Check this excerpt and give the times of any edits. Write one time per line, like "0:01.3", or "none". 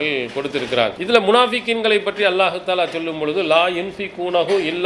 0:01.0

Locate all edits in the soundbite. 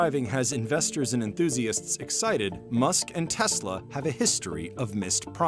none

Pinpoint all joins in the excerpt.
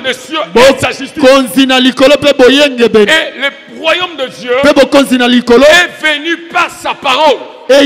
none

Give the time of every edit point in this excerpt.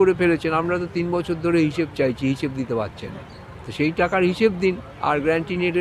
none

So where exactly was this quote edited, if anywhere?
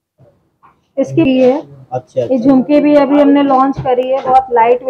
0:01.2

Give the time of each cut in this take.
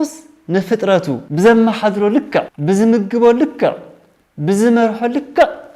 0:01.2
0:02.5

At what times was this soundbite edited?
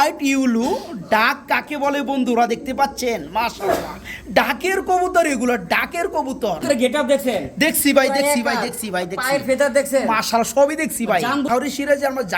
0:06.6
0:11.5

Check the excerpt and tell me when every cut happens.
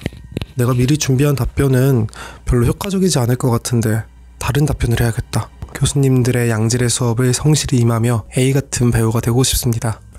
0:05.7

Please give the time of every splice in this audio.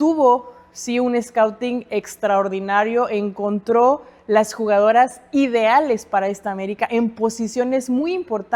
none

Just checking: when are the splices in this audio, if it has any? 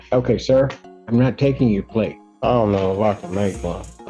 0:02.2

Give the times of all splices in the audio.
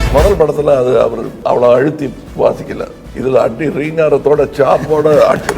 0:01.3
0:02.2
0:03.0

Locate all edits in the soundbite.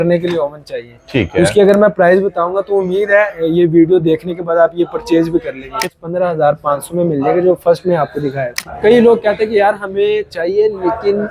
0:05.8
0:08.7

